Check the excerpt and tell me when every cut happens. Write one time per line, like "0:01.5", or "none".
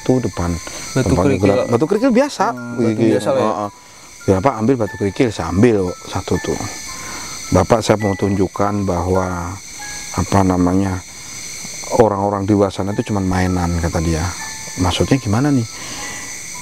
none